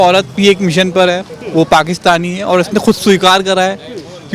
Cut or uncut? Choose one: uncut